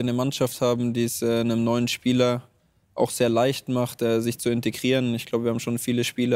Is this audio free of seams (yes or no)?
yes